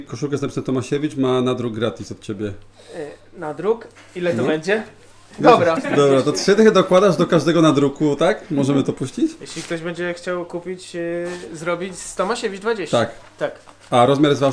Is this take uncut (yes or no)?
no